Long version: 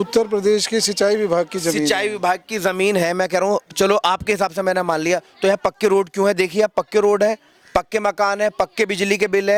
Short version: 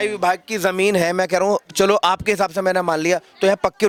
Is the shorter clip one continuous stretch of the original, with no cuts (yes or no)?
yes